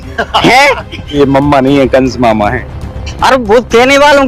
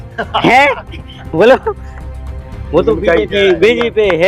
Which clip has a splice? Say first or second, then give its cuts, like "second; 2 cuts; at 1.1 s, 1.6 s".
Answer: first; 1 cut; at 1.1 s